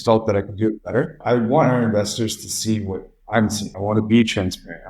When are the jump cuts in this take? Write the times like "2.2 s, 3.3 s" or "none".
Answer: 1.2 s, 3.7 s